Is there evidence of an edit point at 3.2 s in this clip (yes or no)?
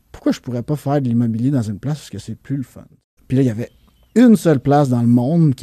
yes